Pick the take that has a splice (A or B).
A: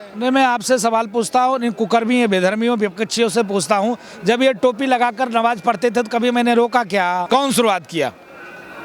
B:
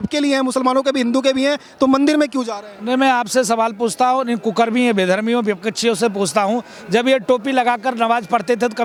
A